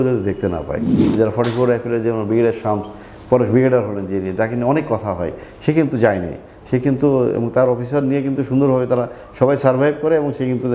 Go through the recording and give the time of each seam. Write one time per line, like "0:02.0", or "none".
0:01.0